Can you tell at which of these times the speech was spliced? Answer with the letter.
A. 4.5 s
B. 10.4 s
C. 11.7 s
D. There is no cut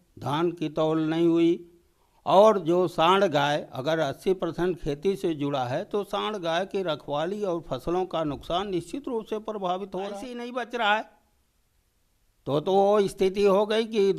B